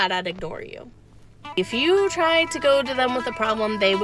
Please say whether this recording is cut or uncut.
cut